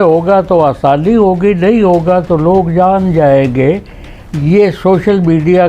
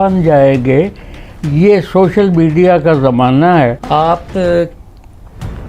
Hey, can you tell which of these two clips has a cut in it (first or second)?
second